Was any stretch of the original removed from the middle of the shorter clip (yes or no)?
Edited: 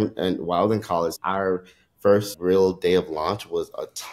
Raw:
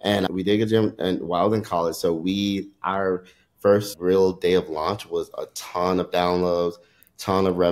yes